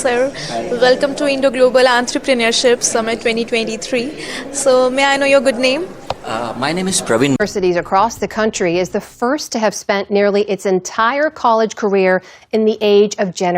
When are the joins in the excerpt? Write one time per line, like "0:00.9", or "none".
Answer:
0:07.4